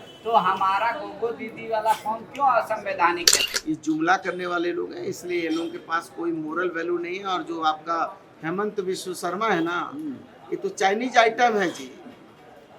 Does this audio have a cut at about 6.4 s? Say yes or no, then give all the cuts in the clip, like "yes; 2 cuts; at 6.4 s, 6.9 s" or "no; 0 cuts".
no; 1 cut; at 3.4 s